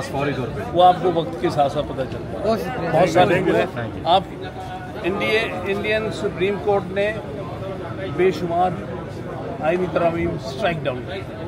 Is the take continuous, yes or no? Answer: yes